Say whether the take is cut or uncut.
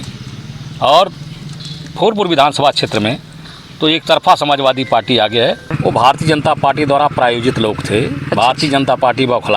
cut